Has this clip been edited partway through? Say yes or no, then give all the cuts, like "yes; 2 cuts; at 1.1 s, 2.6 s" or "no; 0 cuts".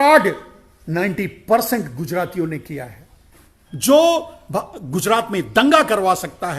yes; 1 cut; at 3.6 s